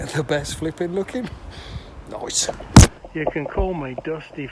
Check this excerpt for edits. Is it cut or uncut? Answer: cut